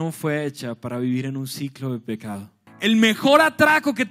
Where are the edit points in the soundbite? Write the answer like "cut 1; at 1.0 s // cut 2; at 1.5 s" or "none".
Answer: cut 1; at 2.6 s